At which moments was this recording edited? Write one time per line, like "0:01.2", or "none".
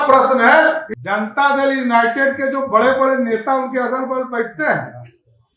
0:00.9